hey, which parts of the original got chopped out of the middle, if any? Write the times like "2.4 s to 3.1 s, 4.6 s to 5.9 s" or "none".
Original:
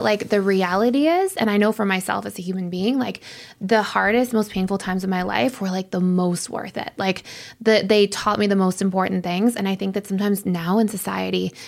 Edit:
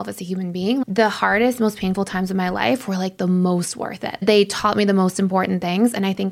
3.0 s to 3.6 s, 6.9 s to 7.8 s